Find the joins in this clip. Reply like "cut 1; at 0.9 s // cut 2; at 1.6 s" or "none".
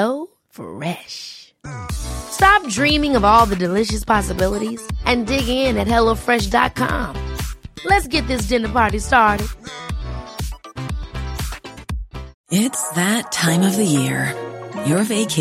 cut 1; at 12.3 s

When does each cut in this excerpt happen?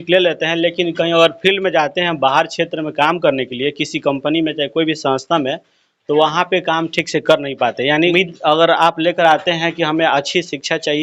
none

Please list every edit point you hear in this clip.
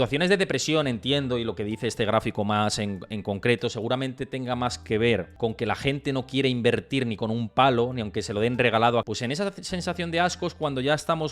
cut 1; at 5.3 s // cut 2; at 9.1 s

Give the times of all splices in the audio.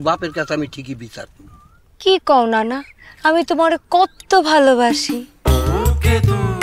none

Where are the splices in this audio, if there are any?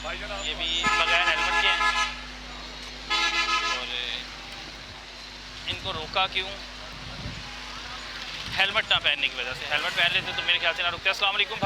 none

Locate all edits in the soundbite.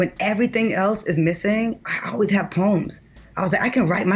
none

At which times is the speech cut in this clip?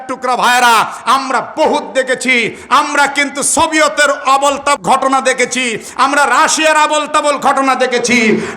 cut 1; at 4.8 s

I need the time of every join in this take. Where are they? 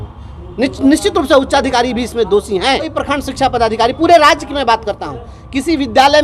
cut 1; at 2.9 s

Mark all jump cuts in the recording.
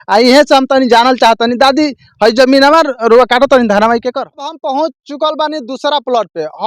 cut 1; at 4.6 s

